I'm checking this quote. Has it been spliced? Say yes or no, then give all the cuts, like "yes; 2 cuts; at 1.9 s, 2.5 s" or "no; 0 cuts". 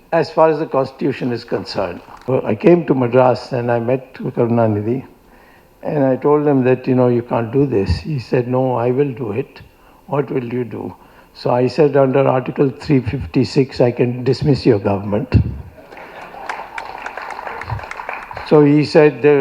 yes; 1 cut; at 2.2 s